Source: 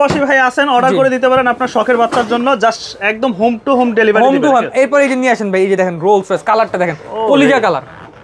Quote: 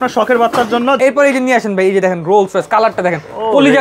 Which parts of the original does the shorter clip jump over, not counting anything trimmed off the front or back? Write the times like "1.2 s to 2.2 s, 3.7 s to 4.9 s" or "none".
2.6 s to 4.7 s